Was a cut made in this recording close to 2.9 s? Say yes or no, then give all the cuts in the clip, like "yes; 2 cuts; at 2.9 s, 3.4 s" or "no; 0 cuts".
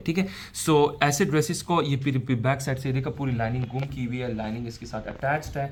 no; 0 cuts